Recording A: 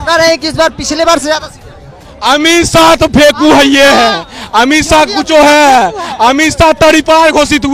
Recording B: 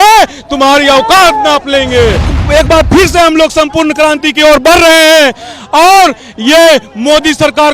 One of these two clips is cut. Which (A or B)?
B